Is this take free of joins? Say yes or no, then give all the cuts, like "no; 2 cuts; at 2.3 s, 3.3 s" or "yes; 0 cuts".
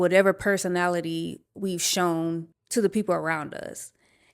no; 1 cut; at 2.6 s